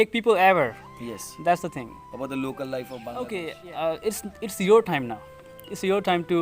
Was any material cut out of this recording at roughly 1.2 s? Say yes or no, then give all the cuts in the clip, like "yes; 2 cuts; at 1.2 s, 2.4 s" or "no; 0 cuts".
no; 1 cut; at 3.0 s